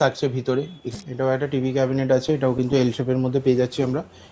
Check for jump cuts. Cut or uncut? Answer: cut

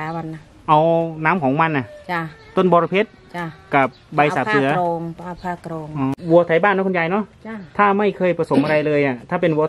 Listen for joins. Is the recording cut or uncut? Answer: cut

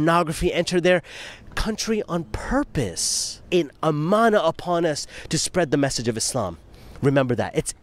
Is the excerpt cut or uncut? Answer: cut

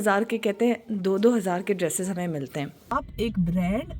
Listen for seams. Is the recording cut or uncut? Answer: cut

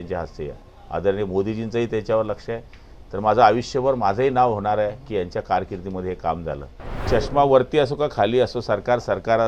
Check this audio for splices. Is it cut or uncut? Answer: cut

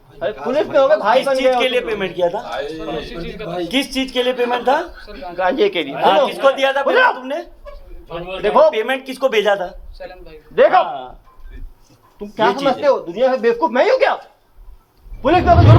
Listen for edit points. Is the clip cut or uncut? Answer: uncut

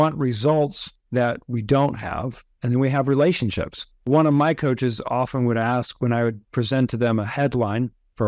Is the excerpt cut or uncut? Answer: cut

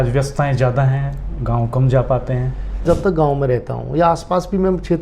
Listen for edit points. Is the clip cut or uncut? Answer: cut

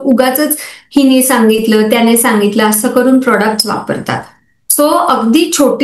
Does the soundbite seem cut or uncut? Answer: uncut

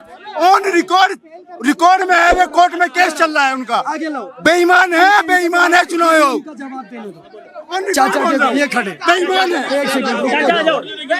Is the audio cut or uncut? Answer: uncut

